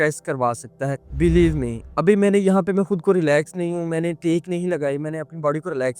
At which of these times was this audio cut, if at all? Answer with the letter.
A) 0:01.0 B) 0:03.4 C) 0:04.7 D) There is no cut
A